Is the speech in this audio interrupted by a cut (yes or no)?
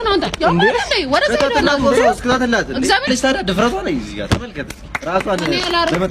yes